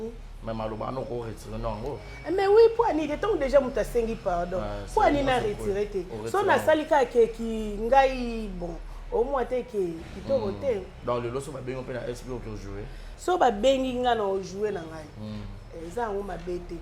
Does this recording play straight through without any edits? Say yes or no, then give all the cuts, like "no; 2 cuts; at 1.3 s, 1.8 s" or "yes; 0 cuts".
no; 1 cut; at 13.0 s